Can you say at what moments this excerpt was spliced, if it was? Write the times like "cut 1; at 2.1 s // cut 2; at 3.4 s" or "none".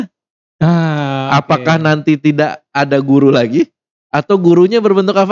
none